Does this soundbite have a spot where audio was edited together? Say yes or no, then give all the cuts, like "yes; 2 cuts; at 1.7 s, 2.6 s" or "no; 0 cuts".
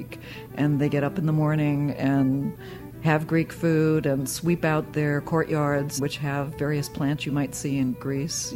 yes; 1 cut; at 6.0 s